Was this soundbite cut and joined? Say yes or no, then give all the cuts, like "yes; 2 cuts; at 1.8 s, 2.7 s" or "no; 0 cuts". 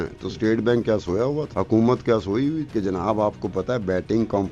yes; 2 cuts; at 1.5 s, 2.7 s